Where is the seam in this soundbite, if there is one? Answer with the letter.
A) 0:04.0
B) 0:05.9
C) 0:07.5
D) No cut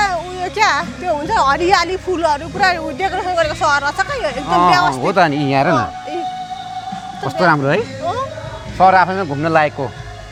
D